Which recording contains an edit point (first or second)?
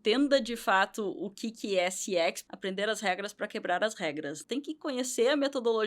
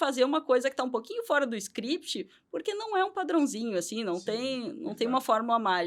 first